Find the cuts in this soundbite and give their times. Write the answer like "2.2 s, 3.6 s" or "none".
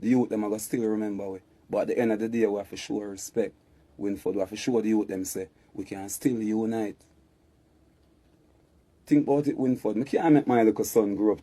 none